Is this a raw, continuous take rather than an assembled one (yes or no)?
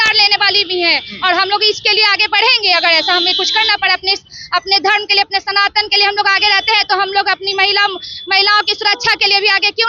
yes